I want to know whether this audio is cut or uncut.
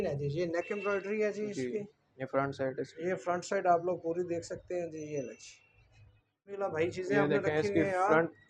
cut